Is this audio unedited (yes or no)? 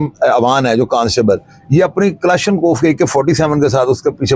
yes